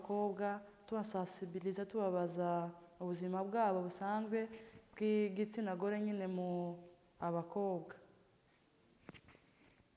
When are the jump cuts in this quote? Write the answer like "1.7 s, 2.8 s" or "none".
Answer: none